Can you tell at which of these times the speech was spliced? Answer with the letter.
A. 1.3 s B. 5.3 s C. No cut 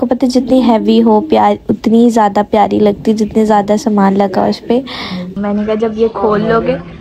B